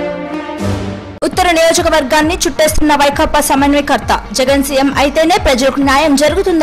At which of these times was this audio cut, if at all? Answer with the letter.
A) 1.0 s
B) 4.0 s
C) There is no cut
A